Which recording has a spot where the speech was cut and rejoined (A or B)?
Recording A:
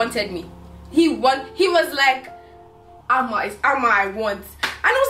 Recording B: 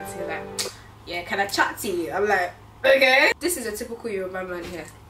B